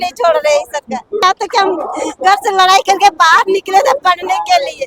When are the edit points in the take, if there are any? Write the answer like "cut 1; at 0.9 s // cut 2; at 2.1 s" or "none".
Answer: cut 1; at 1.2 s